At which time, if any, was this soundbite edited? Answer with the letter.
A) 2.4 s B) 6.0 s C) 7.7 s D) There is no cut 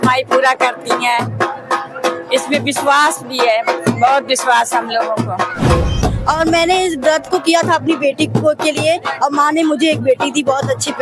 B